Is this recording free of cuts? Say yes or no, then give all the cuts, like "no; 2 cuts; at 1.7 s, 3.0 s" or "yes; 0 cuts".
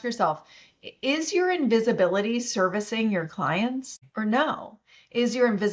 no; 1 cut; at 4.0 s